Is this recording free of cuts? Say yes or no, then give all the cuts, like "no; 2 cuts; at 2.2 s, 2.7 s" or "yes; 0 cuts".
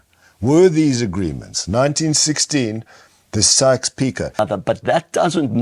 no; 1 cut; at 4.4 s